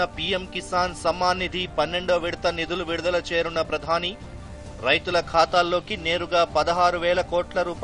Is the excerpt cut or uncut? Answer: uncut